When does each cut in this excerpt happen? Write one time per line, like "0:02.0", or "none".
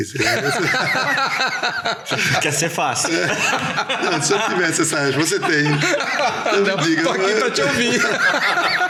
none